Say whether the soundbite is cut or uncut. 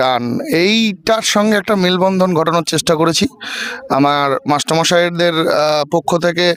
uncut